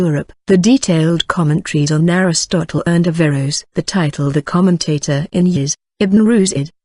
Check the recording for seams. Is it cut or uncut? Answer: uncut